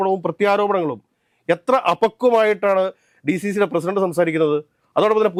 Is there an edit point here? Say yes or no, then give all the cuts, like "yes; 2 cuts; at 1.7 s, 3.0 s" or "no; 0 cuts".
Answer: no; 0 cuts